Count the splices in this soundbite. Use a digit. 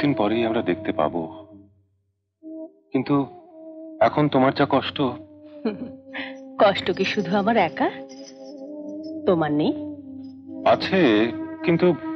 0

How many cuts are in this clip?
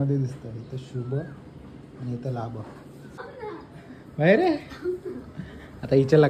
1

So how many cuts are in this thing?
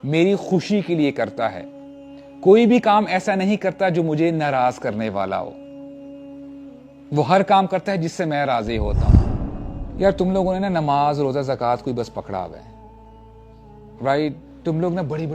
1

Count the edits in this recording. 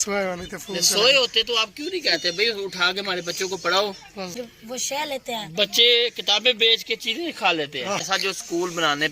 2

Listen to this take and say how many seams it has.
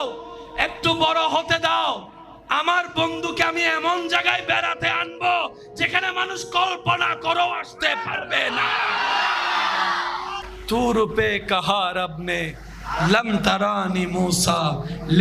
1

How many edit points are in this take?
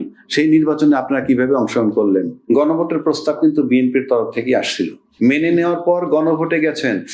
2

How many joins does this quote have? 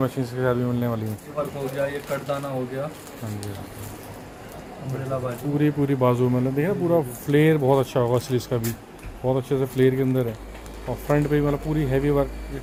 0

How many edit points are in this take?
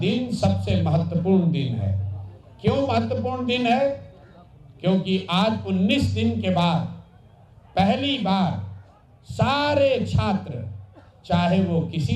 0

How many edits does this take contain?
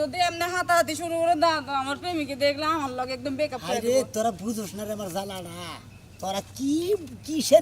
0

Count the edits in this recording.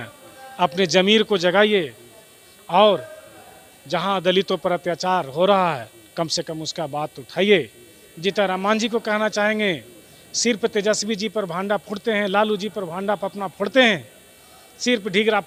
0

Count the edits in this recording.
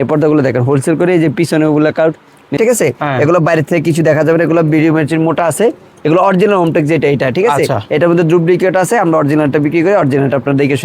1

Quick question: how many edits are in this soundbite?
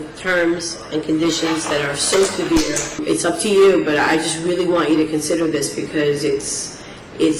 1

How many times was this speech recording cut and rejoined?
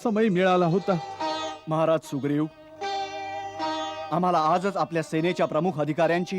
1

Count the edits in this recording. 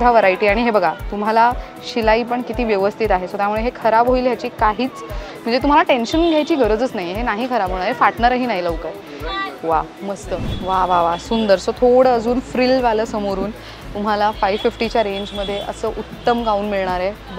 1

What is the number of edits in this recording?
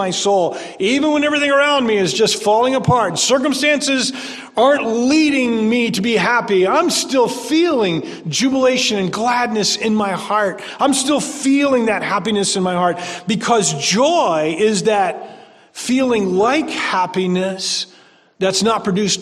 0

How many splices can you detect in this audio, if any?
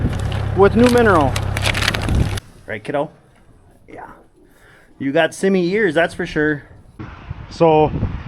2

